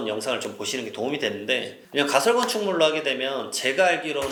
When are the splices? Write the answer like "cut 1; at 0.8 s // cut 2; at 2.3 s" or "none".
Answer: none